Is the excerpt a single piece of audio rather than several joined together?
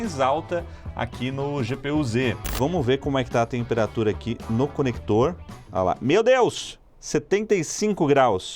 no; 1 cut; at 2.5 s

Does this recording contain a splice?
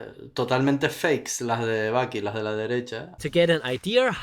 yes; 1 cut; at 3.0 s

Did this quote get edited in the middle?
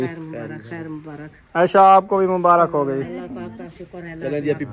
no; 0 cuts

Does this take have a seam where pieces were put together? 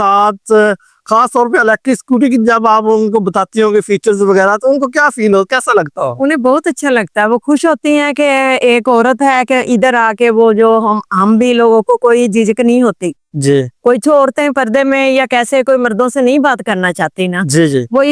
no; 0 cuts

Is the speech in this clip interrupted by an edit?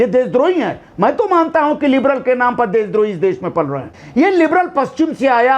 yes; 1 cut; at 4.0 s

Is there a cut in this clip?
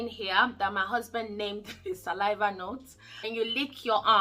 yes; 1 cut; at 3.2 s

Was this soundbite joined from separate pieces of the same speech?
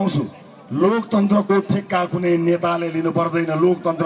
no; 0 cuts

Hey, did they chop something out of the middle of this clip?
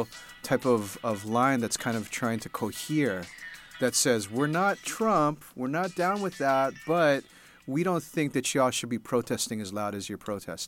no; 0 cuts

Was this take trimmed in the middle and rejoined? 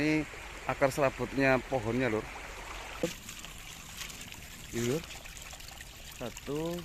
yes; 1 cut; at 3.0 s

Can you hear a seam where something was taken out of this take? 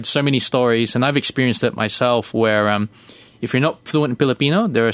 no; 0 cuts

